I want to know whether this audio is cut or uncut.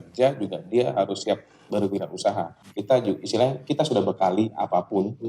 cut